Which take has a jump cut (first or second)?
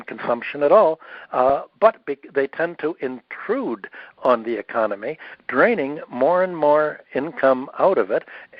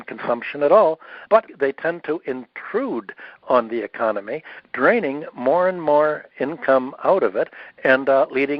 second